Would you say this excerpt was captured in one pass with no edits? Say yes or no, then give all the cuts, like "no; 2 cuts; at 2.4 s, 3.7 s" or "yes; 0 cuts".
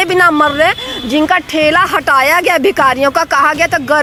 yes; 0 cuts